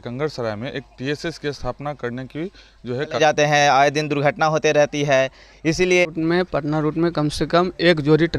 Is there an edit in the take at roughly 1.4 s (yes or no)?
no